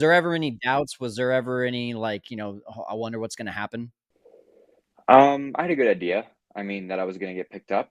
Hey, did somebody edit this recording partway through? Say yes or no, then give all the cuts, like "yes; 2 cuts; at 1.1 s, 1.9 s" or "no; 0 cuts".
no; 0 cuts